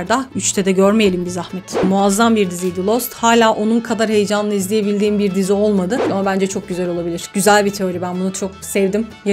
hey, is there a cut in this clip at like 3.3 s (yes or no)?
no